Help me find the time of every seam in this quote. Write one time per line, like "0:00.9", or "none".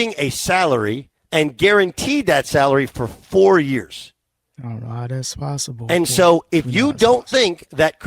0:01.1